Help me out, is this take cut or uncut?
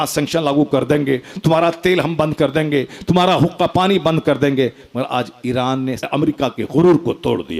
cut